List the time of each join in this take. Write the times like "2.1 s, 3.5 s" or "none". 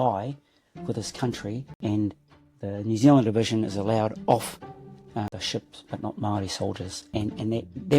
1.7 s, 5.3 s, 7.0 s